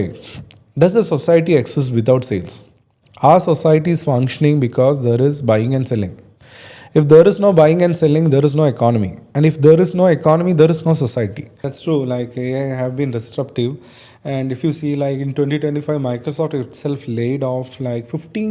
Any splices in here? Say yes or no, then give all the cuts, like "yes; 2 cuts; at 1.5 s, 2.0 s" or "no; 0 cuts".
yes; 1 cut; at 11.7 s